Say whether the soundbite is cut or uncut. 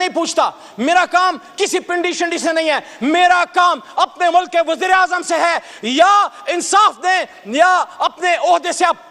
uncut